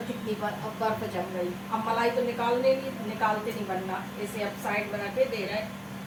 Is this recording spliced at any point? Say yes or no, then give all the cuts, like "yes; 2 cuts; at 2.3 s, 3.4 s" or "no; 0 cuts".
no; 0 cuts